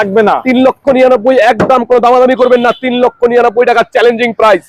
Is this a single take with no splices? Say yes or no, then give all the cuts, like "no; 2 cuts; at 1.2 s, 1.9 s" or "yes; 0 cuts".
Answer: yes; 0 cuts